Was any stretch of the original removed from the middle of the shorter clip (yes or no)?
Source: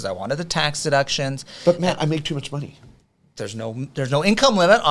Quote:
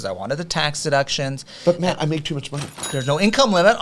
yes